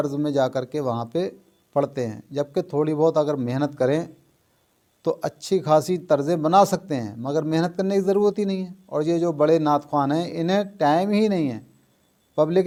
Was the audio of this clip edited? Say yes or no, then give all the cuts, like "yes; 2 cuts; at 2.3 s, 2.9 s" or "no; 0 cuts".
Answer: no; 0 cuts